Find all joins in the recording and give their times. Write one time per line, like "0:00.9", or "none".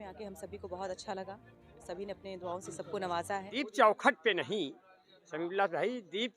0:03.5